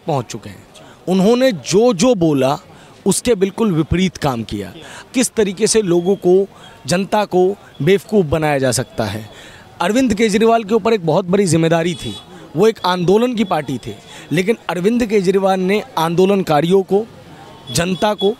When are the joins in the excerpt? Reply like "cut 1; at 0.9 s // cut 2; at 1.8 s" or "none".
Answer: cut 1; at 5.1 s